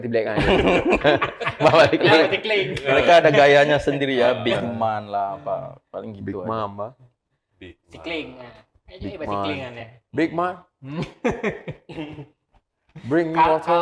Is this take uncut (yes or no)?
yes